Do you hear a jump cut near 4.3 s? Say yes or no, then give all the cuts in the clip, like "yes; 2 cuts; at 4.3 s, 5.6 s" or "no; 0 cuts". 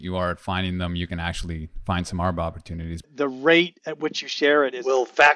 no; 1 cut; at 2.9 s